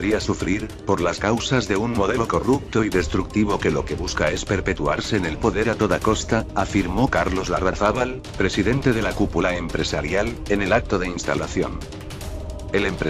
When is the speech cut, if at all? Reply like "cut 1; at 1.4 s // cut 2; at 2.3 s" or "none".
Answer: cut 1; at 6.7 s